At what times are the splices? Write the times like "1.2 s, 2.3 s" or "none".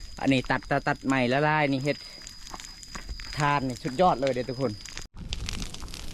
5.1 s

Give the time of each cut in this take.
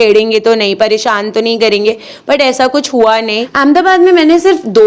3.5 s

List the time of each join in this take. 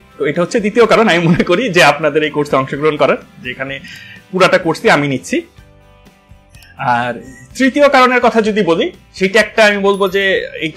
none

